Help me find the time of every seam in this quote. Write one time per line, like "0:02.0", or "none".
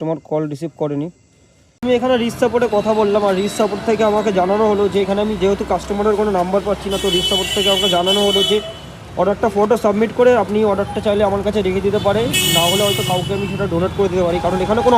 0:01.8